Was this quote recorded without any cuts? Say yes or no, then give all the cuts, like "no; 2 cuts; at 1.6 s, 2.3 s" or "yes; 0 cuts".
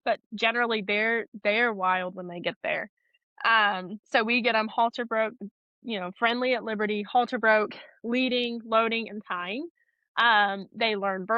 yes; 0 cuts